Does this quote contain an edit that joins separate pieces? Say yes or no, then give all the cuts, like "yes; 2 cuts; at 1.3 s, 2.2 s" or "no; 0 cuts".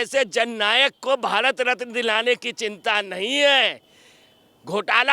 no; 0 cuts